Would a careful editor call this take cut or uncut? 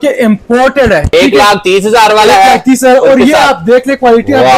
cut